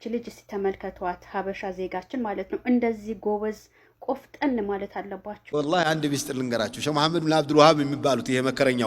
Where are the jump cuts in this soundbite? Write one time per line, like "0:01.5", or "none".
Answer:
0:05.4